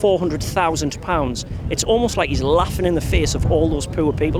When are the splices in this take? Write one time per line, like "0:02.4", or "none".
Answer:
none